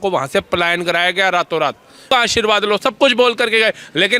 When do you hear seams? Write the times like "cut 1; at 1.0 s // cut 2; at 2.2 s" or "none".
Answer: cut 1; at 2.1 s